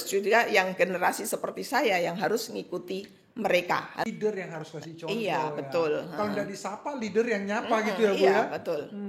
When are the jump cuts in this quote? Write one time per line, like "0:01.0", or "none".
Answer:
0:04.1

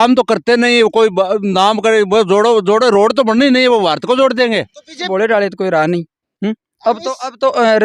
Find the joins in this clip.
0:05.0

